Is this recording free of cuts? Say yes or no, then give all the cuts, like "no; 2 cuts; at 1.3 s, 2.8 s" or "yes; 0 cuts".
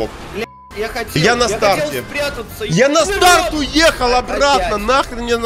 yes; 0 cuts